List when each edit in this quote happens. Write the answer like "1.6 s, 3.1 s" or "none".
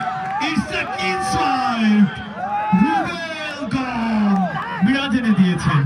4.6 s